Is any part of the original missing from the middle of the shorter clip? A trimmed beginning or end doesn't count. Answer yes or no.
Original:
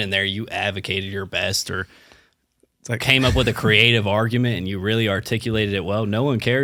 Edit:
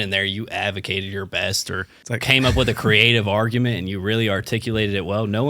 yes